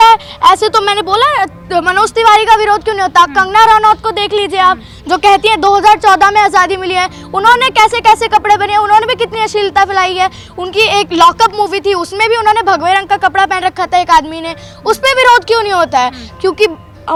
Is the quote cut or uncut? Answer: uncut